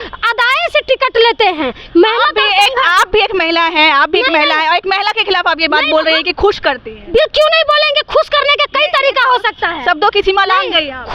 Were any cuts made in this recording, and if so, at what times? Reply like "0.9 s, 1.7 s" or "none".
none